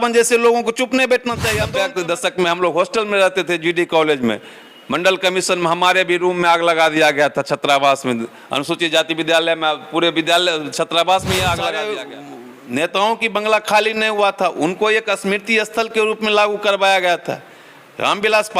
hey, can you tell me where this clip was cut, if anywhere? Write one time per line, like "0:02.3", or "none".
0:01.5
0:11.8